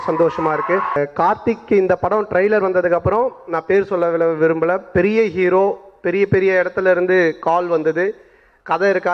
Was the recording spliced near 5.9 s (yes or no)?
no